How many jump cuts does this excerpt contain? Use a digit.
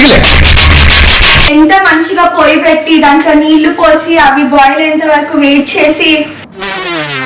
1